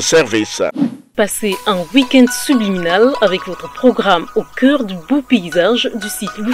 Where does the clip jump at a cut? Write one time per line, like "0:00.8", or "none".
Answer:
0:01.1